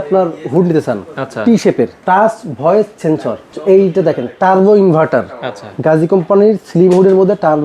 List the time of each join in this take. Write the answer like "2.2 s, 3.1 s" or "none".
2.0 s, 3.5 s